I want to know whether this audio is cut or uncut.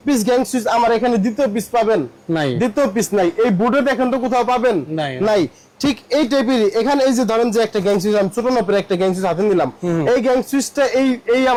uncut